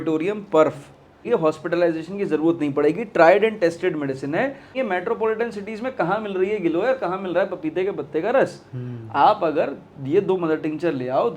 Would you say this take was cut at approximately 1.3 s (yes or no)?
yes